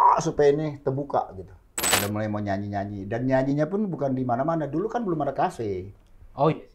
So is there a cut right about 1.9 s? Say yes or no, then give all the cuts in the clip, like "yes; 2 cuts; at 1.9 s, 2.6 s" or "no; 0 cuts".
yes; 1 cut; at 1.9 s